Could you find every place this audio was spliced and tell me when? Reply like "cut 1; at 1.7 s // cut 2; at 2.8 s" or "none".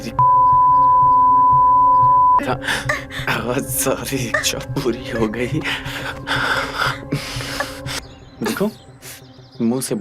cut 1; at 8.0 s

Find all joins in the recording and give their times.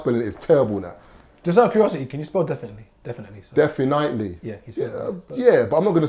none

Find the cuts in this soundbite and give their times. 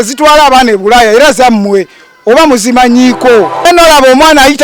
cut 1; at 3.7 s

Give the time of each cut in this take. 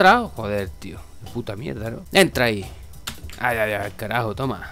cut 1; at 1.9 s

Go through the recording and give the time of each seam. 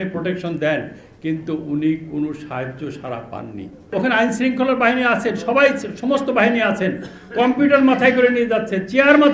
cut 1; at 3.9 s

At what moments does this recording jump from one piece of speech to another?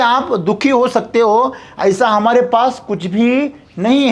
none

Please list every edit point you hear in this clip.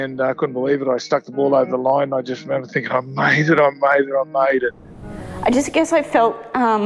cut 1; at 5.1 s

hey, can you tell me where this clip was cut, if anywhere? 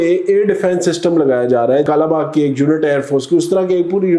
none

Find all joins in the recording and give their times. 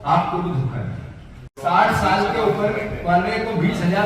cut 1; at 1.5 s

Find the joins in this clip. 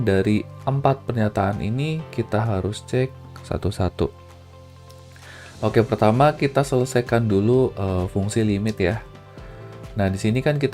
cut 1; at 4.1 s // cut 2; at 5.5 s

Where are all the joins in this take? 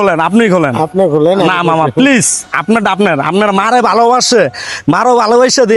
none

